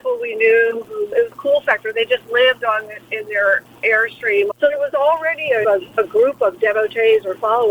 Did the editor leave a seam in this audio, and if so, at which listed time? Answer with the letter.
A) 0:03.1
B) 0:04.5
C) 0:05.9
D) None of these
B